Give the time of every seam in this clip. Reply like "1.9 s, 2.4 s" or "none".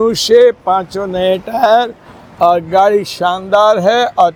none